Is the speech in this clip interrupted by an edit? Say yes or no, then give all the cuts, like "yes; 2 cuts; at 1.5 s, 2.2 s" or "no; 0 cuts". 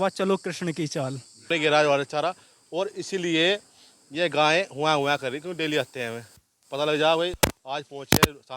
yes; 2 cuts; at 1.5 s, 7.4 s